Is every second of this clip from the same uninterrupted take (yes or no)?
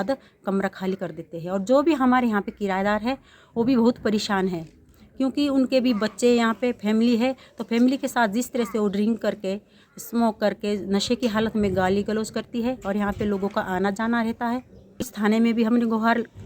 no